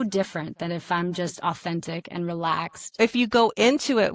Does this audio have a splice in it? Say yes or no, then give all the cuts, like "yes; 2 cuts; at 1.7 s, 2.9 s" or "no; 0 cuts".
yes; 1 cut; at 3.0 s